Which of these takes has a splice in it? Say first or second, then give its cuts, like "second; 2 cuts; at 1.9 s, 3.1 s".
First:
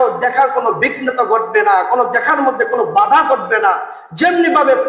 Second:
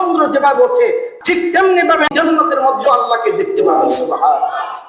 second; 2 cuts; at 1.1 s, 2.1 s